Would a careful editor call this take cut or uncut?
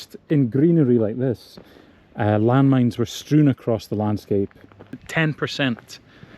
cut